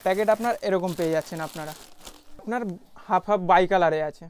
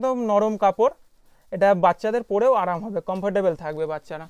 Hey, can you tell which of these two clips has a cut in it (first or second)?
first